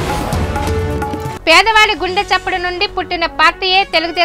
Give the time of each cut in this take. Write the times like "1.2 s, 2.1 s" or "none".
1.3 s